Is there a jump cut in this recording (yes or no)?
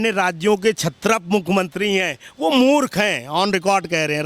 no